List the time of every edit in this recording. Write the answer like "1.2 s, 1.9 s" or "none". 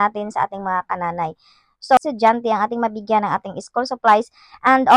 2.0 s